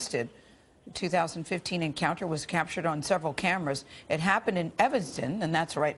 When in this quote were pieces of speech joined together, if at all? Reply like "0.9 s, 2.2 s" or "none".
4.7 s